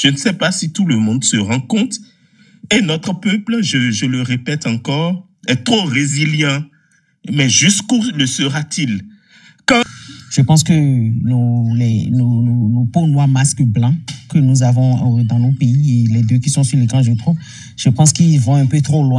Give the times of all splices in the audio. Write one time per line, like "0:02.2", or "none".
0:09.9